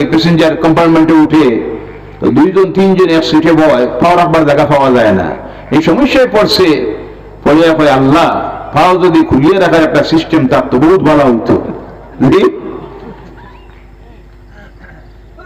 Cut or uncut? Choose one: uncut